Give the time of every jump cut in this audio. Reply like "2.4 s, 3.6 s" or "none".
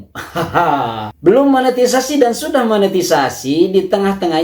1.1 s